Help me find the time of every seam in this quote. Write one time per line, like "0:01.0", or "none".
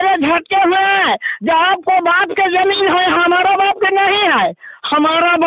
none